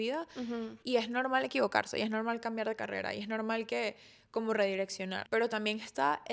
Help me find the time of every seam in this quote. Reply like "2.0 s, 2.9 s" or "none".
5.2 s